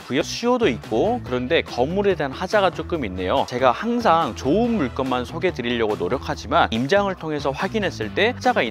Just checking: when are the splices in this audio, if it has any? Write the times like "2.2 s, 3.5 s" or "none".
none